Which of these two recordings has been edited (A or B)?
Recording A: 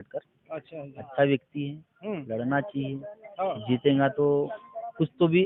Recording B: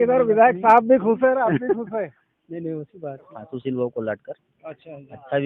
B